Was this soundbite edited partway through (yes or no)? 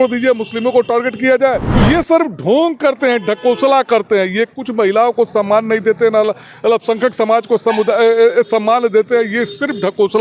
yes